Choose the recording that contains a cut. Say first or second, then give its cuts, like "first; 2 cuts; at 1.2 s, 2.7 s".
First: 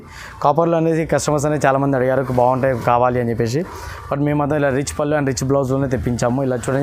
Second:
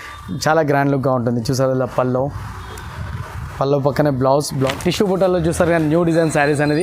second; 1 cut; at 4.7 s